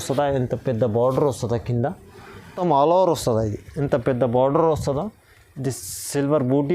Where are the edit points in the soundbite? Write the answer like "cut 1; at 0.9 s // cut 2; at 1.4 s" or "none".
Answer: cut 1; at 2.6 s